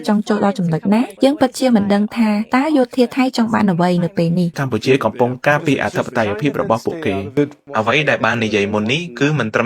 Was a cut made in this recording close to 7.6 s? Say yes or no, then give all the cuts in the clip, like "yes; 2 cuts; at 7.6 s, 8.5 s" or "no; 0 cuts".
yes; 3 cuts; at 1.1 s, 4.5 s, 7.6 s